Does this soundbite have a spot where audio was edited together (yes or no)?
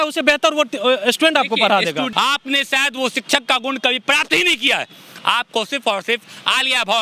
yes